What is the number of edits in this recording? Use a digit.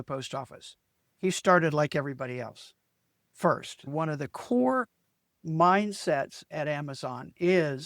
1